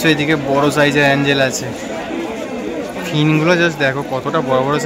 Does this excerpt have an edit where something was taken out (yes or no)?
no